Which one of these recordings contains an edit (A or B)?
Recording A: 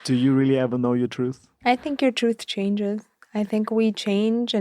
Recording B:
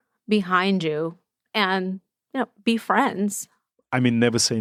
A